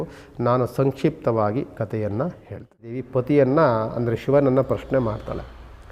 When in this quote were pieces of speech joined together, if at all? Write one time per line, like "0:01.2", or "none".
0:03.0